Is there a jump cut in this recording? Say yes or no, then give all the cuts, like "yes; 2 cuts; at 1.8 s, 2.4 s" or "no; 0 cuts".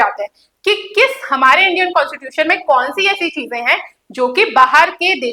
no; 0 cuts